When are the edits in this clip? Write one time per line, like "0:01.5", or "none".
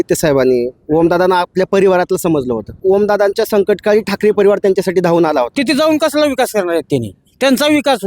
0:02.8
0:05.5